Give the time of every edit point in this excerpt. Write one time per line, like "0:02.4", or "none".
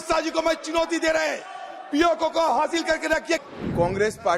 0:03.4